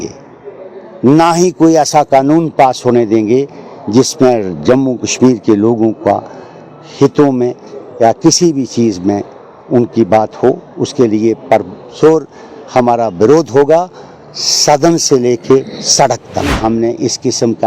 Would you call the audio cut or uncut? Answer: cut